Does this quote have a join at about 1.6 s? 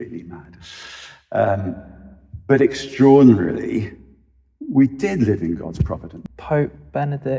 no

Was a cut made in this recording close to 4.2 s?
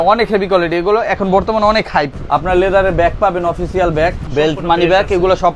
yes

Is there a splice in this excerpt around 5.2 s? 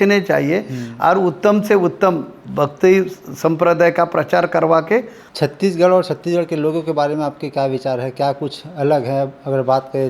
yes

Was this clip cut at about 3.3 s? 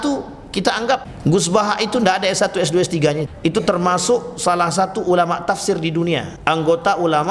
yes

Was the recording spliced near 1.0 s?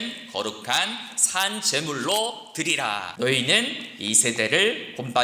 no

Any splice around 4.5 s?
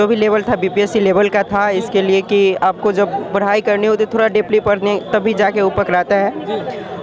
no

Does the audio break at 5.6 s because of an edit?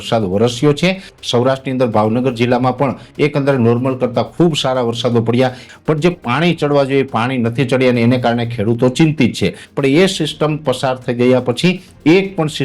yes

